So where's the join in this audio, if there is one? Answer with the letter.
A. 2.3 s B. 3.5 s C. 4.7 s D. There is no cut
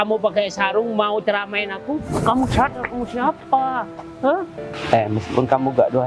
C